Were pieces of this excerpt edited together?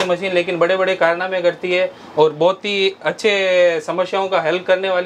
no; 0 cuts

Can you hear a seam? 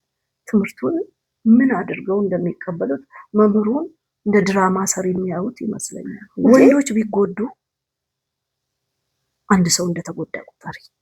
yes; 1 cut; at 6.5 s

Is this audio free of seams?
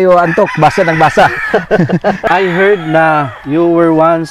no; 1 cut; at 2.2 s

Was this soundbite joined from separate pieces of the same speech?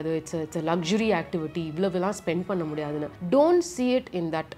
no; 0 cuts

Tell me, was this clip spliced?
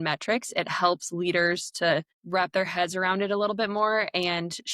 yes; 1 cut; at 2.2 s

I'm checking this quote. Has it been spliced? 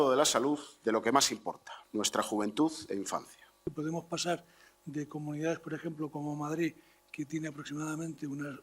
yes; 2 cuts; at 1.7 s, 3.7 s

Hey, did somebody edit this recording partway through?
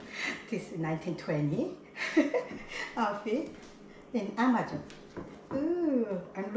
no; 0 cuts

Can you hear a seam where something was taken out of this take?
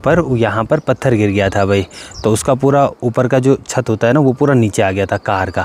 no; 0 cuts

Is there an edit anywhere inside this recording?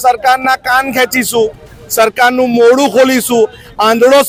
no; 0 cuts

